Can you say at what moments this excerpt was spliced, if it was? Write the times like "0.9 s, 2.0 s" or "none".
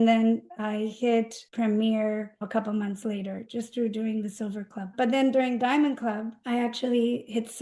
0.9 s, 2.4 s, 3.4 s, 4.9 s, 6.3 s